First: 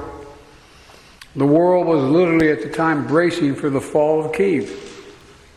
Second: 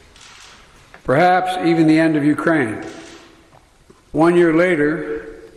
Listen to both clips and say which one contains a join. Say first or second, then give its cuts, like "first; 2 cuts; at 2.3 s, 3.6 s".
second; 2 cuts; at 1.1 s, 4.0 s